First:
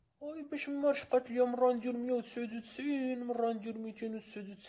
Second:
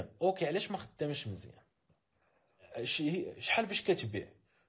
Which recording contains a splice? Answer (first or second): second